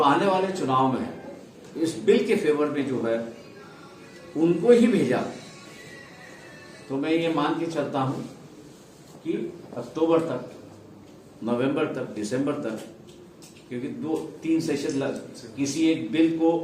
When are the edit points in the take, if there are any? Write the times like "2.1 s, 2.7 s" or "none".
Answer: none

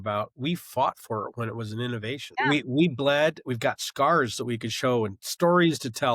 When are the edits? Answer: 2.3 s

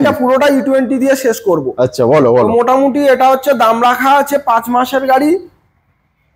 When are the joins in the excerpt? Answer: none

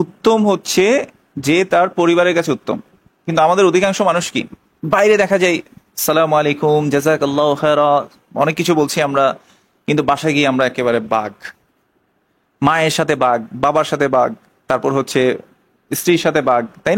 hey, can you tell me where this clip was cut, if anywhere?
none

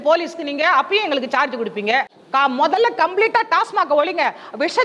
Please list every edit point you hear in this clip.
2.2 s

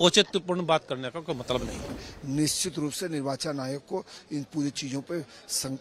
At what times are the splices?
2.0 s

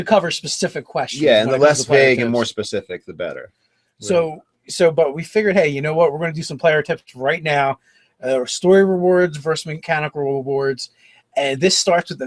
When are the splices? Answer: none

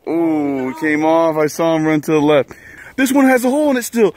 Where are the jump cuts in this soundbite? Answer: 2.8 s

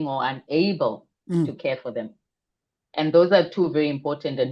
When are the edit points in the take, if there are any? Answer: none

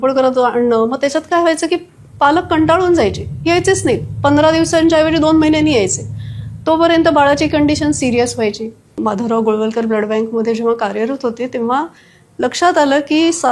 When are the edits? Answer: 8.8 s

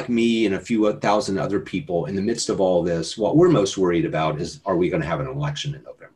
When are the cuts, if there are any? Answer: none

